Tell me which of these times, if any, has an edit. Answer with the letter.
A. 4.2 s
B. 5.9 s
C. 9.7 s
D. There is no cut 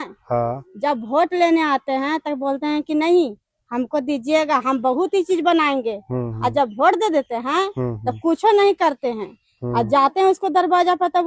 D